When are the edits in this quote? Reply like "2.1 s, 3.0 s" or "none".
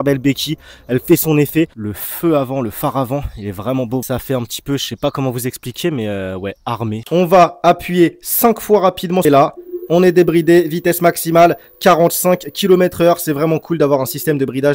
1.8 s, 4.0 s, 7.0 s, 9.2 s

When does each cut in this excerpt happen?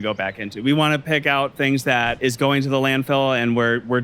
2.2 s

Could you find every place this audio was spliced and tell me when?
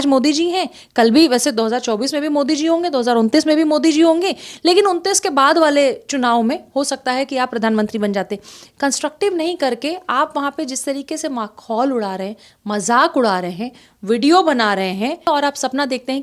15.3 s

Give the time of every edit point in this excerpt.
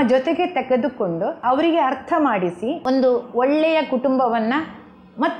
1.4 s, 2.8 s

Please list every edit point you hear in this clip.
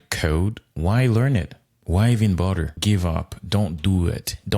2.7 s

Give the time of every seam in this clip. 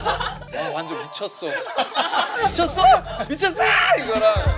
none

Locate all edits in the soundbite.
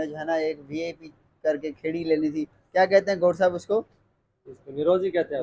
none

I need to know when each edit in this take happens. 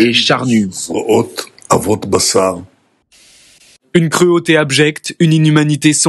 3.3 s

